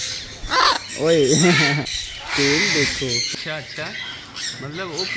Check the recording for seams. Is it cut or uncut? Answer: cut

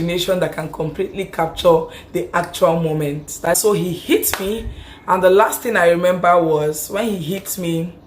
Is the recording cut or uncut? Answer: cut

